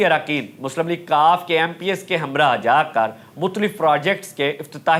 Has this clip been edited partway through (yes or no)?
no